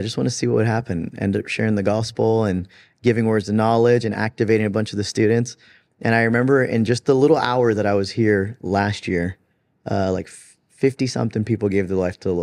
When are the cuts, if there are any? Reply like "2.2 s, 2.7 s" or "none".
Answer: none